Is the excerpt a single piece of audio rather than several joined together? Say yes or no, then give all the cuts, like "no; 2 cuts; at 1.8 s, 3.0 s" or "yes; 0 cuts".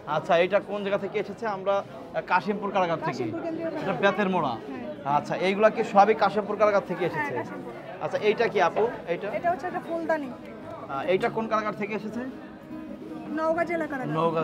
yes; 0 cuts